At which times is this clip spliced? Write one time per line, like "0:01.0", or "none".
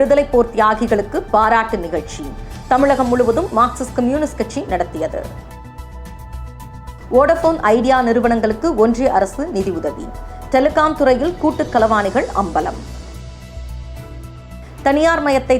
0:05.3
0:06.9